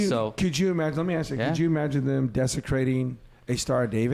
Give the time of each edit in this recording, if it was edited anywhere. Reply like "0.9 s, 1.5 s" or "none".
none